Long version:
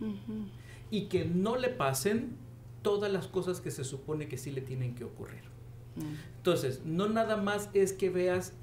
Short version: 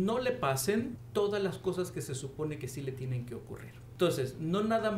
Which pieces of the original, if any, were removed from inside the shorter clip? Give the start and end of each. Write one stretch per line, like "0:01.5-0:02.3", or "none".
0:02.4-0:02.7
0:05.5-0:06.3